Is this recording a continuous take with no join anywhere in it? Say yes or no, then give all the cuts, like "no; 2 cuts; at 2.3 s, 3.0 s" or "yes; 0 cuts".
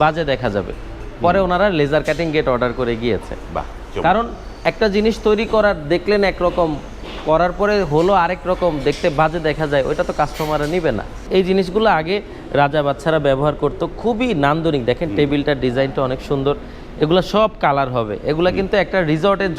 no; 1 cut; at 11.2 s